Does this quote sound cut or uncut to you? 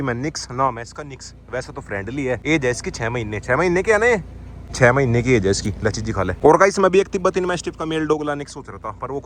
uncut